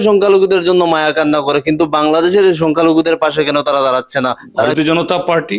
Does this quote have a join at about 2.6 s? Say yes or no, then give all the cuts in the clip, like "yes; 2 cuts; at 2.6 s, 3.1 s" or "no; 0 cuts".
no; 1 cut; at 4.7 s